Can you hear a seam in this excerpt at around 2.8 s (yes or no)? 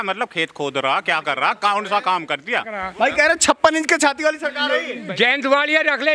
yes